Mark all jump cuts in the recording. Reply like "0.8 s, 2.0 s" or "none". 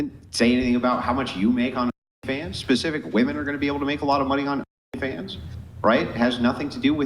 5.1 s